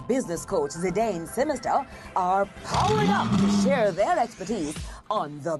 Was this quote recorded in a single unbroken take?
yes; 0 cuts

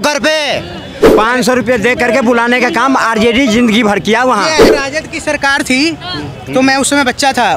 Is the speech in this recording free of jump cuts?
no; 2 cuts; at 1.1 s, 4.7 s

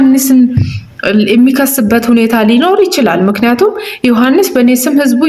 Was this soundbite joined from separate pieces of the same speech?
no; 0 cuts

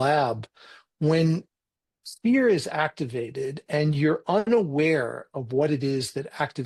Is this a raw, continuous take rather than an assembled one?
yes; 0 cuts

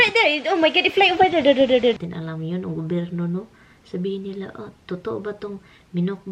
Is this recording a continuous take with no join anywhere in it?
no; 1 cut; at 2.0 s

